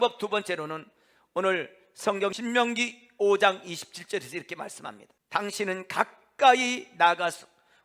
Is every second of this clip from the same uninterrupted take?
no; 2 cuts; at 2.4 s, 5.1 s

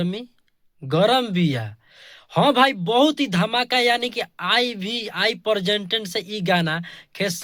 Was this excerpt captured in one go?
yes; 0 cuts

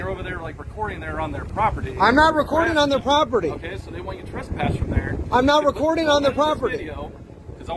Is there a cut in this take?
no; 0 cuts

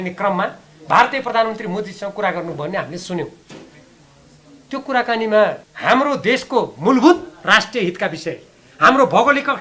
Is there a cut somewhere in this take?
yes; 1 cut; at 5.7 s

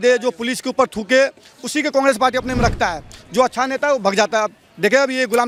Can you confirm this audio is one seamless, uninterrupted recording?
yes; 0 cuts

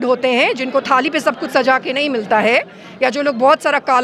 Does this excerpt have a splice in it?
no; 0 cuts

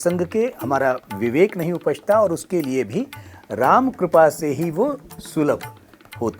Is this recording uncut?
yes; 0 cuts

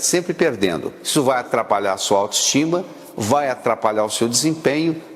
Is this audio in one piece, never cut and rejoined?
no; 1 cut; at 1.0 s

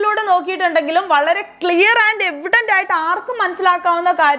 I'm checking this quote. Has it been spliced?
no; 0 cuts

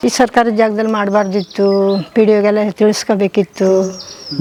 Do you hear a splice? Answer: no; 0 cuts

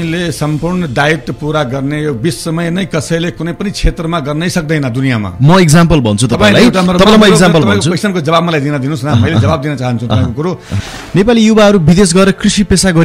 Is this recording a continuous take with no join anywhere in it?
no; 1 cut; at 10.7 s

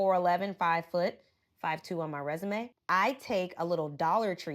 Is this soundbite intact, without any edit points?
no; 1 cut; at 2.8 s

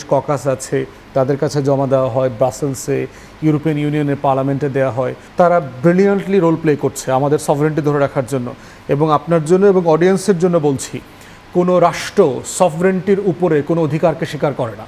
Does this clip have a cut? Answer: yes; 1 cut; at 5.2 s

